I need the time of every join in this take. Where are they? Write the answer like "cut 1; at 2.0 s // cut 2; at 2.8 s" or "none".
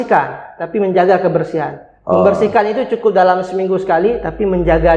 none